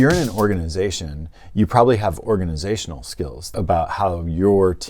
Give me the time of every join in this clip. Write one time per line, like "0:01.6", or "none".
0:03.4